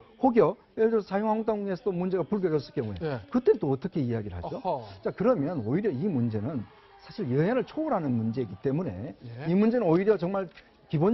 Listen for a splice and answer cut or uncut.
cut